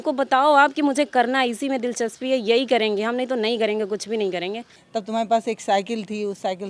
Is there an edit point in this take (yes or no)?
yes